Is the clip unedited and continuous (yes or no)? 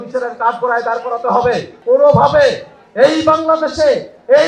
no